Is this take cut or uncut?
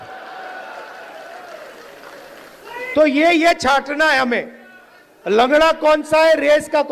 uncut